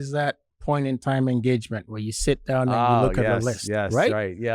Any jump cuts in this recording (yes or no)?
no